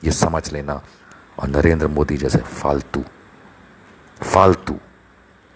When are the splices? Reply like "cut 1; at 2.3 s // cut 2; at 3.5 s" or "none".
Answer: cut 1; at 0.9 s